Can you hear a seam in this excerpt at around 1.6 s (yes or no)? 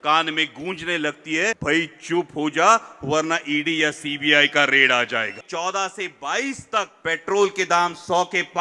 yes